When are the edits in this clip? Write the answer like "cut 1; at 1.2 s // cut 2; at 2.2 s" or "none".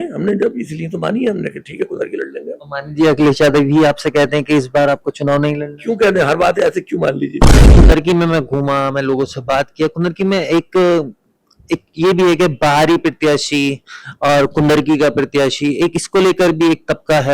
cut 1; at 7.7 s